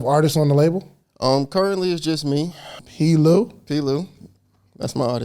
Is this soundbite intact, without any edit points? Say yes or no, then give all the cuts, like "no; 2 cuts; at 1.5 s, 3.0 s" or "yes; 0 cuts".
no; 1 cut; at 2.8 s